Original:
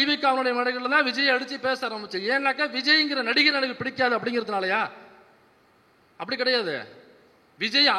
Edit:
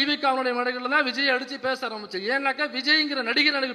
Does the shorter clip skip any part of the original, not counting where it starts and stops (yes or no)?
no